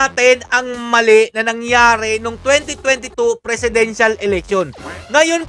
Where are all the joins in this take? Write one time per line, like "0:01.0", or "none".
none